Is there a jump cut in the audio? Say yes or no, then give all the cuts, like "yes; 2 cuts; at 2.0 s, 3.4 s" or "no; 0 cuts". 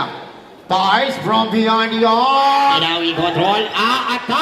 yes; 1 cut; at 2.7 s